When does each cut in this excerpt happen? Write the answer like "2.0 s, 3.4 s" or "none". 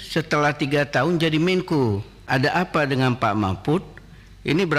2.2 s